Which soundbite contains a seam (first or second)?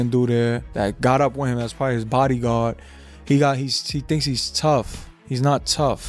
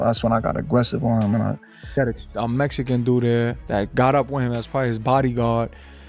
second